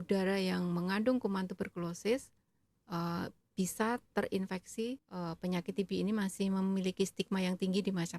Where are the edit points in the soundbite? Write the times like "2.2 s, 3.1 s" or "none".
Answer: 5.1 s